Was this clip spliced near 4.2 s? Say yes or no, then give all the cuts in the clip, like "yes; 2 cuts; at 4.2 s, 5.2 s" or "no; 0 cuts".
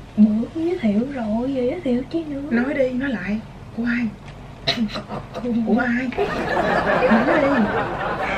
no; 1 cut; at 6.5 s